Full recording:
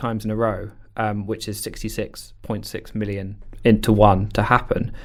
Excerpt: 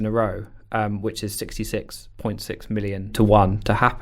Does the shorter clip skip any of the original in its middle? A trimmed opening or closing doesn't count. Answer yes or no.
yes